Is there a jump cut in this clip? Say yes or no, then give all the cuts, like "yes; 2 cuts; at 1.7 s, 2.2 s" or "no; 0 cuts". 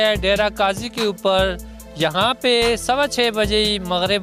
no; 0 cuts